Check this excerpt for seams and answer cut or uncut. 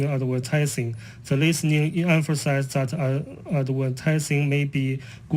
cut